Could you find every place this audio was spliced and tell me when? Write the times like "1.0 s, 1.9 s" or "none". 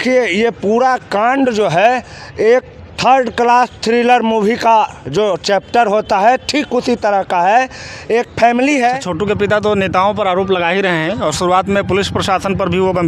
9.0 s